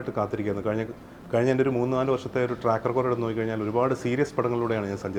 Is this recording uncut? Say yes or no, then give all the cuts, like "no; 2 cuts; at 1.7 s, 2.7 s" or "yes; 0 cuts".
yes; 0 cuts